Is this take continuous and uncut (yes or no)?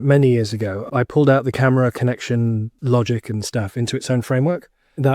no